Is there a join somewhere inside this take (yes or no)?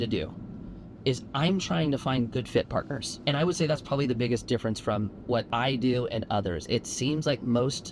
yes